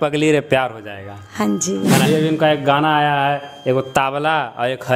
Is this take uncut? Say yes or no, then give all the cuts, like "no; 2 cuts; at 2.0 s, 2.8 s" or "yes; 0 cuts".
no; 1 cut; at 2.0 s